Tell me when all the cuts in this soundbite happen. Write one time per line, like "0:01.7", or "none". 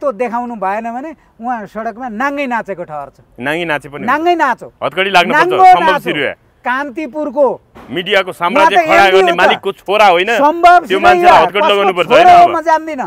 none